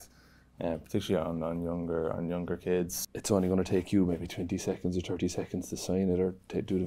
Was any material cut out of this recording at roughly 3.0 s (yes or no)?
yes